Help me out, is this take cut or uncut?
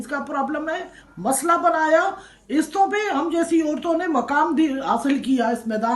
uncut